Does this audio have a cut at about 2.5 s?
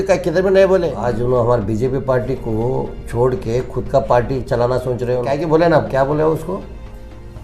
no; 2 cuts; at 1.0 s, 5.4 s

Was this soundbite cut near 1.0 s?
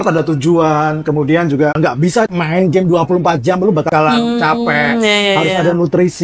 no; 2 cuts; at 2.2 s, 3.9 s

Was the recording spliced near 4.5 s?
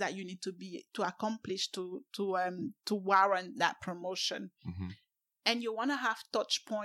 no; 0 cuts

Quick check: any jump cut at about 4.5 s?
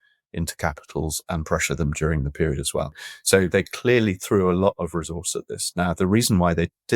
no; 1 cut; at 3.1 s

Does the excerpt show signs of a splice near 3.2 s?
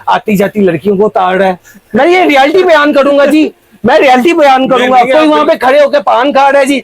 no; 0 cuts

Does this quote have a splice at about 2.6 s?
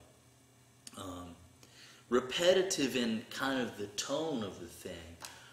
yes; 1 cut; at 2.6 s

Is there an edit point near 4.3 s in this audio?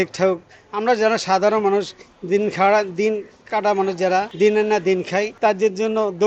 yes; 2 cuts; at 4.3 s, 5.3 s

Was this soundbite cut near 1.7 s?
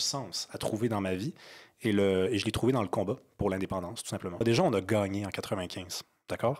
no; 1 cut; at 4.4 s

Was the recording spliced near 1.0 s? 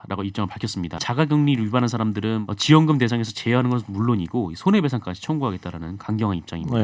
yes; 2 cuts; at 1.0 s, 2.4 s

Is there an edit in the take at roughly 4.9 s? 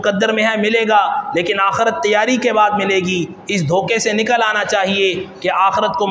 no; 0 cuts

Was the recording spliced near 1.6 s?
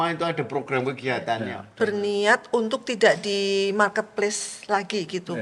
yes; 1 cut; at 1.6 s

